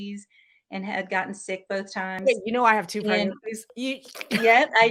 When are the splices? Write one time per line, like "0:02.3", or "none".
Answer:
none